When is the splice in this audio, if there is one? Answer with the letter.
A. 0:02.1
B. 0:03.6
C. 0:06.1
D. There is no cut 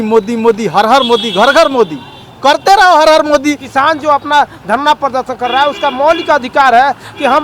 B